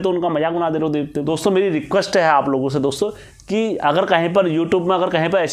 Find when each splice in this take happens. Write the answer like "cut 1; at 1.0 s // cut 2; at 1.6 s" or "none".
cut 1; at 1.3 s